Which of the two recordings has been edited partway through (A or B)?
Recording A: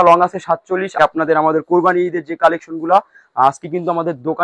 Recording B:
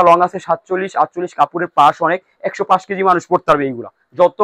A